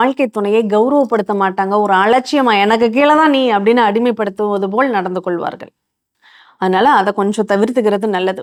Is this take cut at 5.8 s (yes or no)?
no